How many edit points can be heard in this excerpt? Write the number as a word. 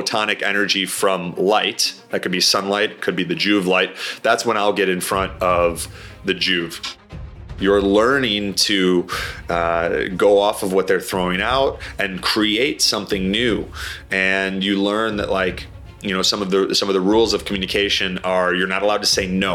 one